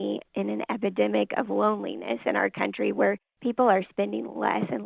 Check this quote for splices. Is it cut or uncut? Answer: uncut